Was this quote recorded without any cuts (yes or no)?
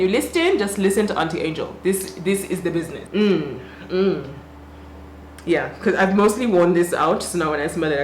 no